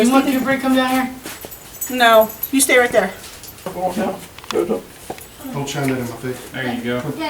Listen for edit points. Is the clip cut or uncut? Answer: cut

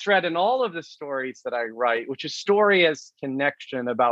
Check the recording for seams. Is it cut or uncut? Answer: uncut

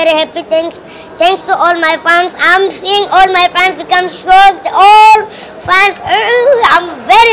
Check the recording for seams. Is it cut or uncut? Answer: uncut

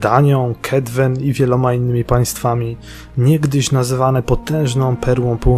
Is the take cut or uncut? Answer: cut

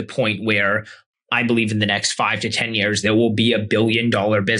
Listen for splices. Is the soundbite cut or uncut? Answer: uncut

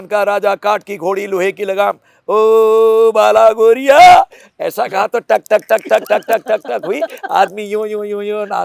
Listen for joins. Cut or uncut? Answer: uncut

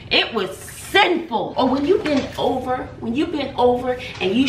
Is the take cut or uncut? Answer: cut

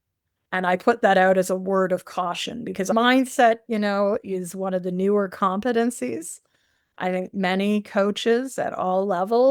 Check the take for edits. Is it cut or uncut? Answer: cut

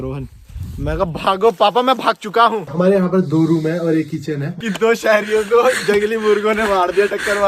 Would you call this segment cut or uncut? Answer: cut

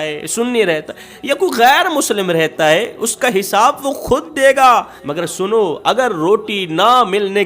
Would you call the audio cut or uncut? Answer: cut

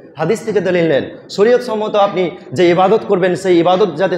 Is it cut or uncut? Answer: uncut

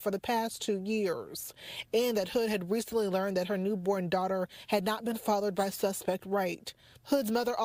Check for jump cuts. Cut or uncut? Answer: uncut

